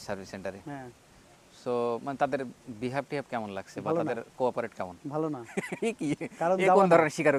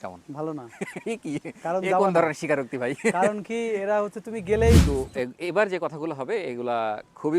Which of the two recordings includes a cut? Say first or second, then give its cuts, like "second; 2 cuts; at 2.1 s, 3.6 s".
second; 1 cut; at 4.8 s